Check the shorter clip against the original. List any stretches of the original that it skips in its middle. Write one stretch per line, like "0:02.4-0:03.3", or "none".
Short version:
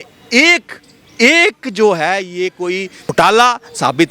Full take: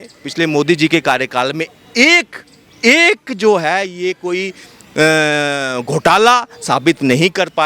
0:04.7-0:05.9